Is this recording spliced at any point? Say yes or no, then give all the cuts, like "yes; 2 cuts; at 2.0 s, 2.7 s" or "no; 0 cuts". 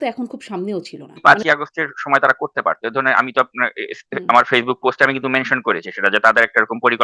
yes; 1 cut; at 1.2 s